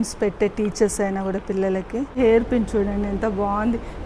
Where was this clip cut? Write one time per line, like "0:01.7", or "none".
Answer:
0:02.2